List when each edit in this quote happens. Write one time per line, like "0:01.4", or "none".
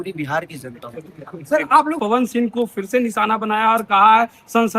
0:02.0